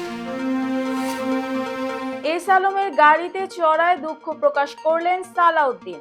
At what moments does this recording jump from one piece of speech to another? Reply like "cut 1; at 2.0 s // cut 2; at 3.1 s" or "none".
cut 1; at 2.1 s